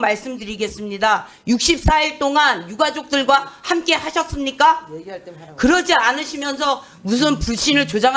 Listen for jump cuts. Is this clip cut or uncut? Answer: uncut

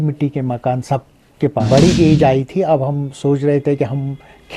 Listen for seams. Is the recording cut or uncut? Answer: cut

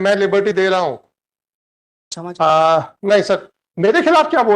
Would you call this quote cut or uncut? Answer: cut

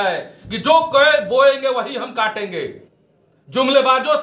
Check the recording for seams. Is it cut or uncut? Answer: uncut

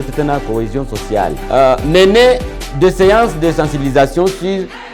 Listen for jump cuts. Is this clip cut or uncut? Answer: cut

